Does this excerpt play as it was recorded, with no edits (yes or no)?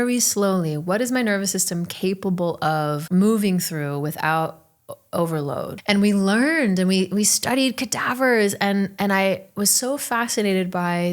no